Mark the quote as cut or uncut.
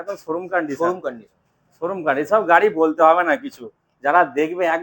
uncut